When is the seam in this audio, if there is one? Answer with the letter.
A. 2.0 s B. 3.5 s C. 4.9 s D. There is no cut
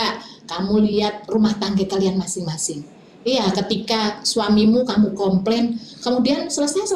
D